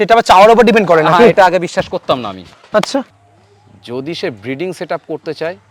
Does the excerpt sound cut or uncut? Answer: cut